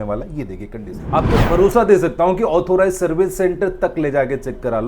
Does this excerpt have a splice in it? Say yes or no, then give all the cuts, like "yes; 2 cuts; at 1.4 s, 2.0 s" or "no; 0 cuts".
yes; 1 cut; at 1.0 s